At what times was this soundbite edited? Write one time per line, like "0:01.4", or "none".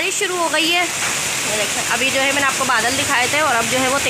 none